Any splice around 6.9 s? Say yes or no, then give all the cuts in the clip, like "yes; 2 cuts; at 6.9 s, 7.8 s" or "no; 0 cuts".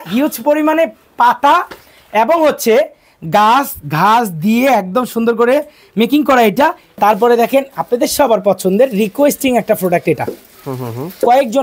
yes; 1 cut; at 6.9 s